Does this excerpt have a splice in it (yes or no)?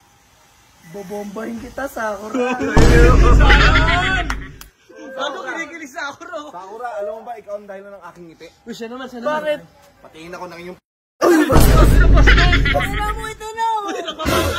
no